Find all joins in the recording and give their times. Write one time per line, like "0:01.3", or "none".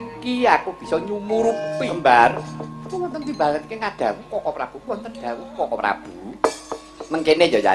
0:01.8